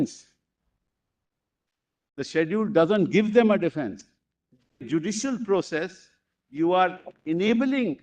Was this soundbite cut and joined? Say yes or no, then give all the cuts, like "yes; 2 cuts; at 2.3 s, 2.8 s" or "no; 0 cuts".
yes; 1 cut; at 4.9 s